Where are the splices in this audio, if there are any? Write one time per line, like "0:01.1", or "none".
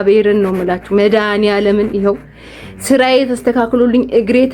none